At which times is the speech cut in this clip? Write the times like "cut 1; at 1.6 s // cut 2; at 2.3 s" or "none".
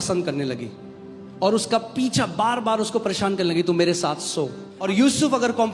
cut 1; at 4.7 s